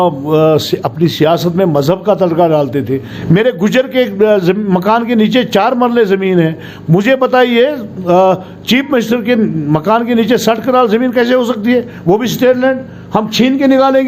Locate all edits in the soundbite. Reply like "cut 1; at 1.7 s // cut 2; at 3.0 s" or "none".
cut 1; at 3.1 s